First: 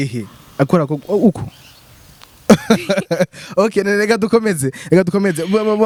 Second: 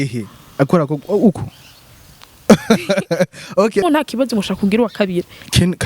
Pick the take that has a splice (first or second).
second